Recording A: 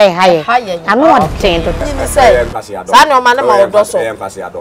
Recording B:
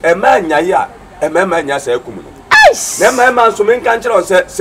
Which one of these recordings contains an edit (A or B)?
A